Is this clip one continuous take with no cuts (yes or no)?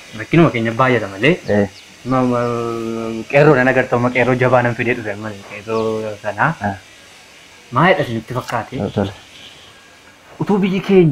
yes